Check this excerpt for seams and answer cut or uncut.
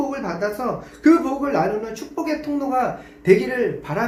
uncut